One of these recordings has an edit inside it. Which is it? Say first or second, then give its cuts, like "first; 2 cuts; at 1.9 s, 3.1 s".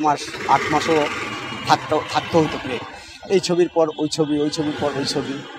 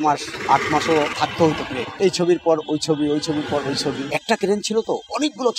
second; 2 cuts; at 1.6 s, 4.1 s